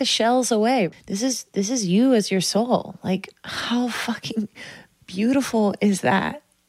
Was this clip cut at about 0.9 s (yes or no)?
yes